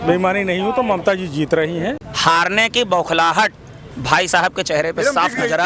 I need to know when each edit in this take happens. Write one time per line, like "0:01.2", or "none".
0:02.0